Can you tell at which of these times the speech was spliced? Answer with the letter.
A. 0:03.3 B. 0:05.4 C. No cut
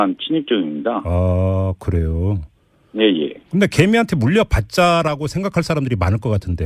C